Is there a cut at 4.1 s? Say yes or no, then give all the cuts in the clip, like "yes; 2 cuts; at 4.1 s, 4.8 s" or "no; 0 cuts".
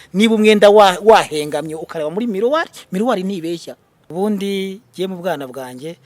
yes; 1 cut; at 4.1 s